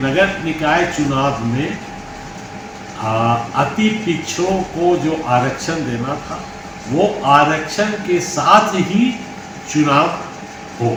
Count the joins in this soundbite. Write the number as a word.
zero